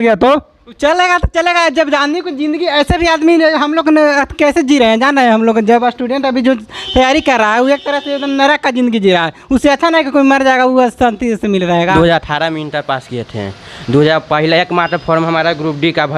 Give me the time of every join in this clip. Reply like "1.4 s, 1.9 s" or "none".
11.9 s